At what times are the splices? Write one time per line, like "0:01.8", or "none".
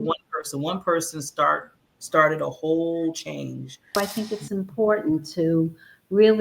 0:04.0